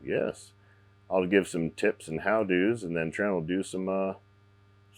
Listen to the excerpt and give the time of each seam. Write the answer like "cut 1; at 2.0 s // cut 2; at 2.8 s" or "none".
none

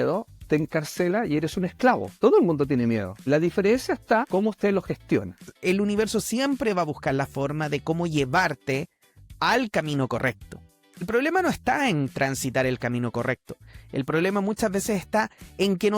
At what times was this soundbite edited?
cut 1; at 2.1 s // cut 2; at 3.1 s // cut 3; at 4.3 s // cut 4; at 5.5 s // cut 5; at 11.1 s

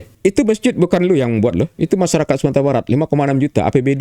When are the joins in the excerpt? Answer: cut 1; at 1.8 s

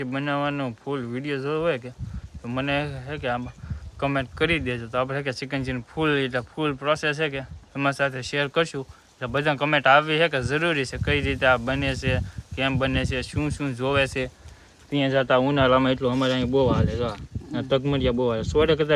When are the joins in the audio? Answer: none

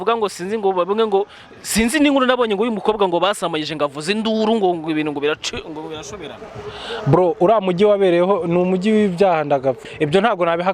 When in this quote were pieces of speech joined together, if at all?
cut 1; at 9.8 s

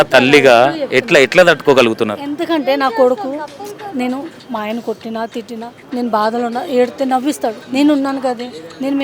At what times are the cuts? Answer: cut 1; at 5.7 s // cut 2; at 7.6 s

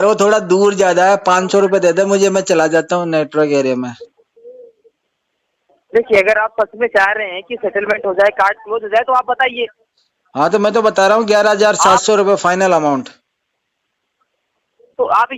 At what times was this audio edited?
none

